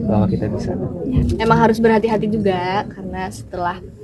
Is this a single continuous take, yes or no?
no